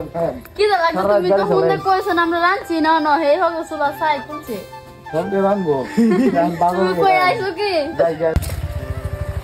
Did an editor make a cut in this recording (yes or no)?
no